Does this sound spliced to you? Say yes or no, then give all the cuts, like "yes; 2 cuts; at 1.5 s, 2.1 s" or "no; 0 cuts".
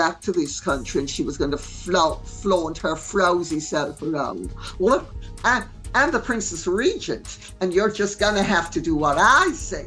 yes; 1 cut; at 1.3 s